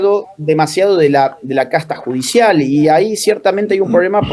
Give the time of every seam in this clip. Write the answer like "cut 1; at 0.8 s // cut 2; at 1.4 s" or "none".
none